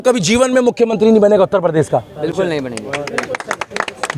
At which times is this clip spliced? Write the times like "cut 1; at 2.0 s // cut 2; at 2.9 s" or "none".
none